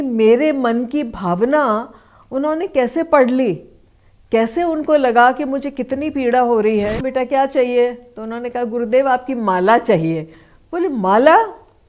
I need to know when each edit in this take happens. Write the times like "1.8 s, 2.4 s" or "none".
7.0 s